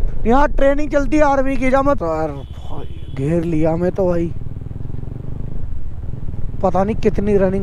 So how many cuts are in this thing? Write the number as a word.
one